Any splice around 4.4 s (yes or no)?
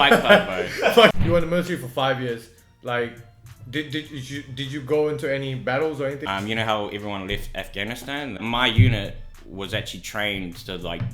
no